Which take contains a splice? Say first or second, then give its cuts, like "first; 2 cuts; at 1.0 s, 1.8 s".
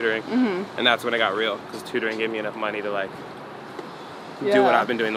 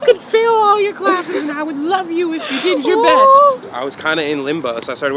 second; 1 cut; at 3.7 s